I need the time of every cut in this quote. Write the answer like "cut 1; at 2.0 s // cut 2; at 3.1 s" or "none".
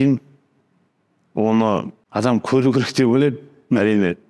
cut 1; at 2.0 s

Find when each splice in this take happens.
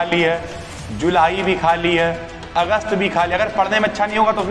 none

